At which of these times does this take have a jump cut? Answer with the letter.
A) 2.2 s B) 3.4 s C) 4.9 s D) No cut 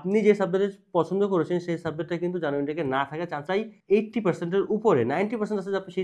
B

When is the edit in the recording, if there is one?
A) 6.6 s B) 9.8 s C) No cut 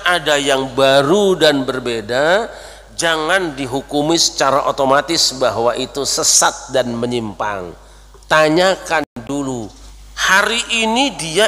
B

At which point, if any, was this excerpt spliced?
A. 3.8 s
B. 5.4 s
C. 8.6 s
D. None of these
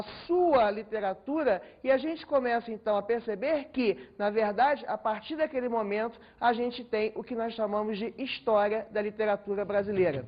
C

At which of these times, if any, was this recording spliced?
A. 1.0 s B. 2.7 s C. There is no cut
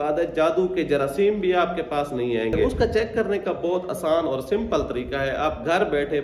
B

